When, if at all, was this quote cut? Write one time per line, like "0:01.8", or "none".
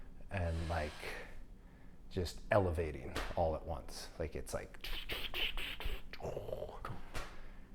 none